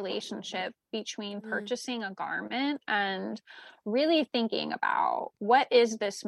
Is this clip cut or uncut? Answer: uncut